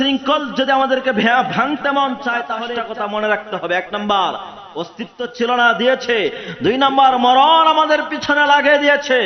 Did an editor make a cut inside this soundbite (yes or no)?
yes